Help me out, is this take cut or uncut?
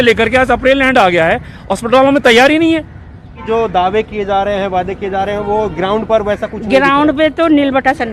cut